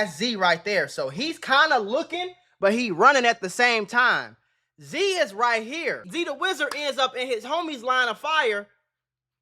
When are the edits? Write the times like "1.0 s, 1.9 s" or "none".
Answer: 6.1 s